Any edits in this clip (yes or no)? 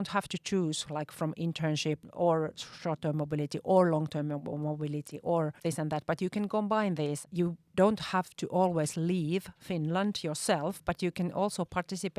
yes